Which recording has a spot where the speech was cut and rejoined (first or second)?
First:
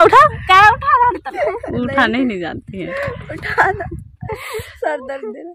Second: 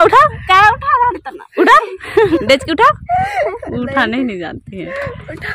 first